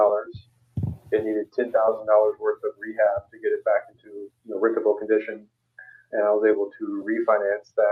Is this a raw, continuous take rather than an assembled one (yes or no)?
yes